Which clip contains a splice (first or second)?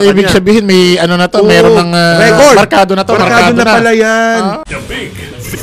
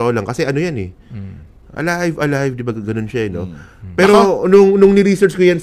first